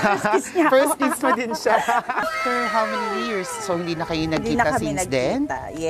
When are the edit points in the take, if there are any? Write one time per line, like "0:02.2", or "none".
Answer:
0:02.3